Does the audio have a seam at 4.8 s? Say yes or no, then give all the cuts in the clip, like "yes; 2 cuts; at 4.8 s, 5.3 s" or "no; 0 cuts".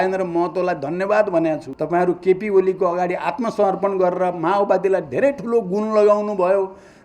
no; 1 cut; at 1.7 s